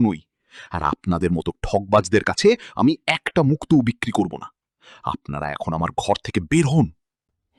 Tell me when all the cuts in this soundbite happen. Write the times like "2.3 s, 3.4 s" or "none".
none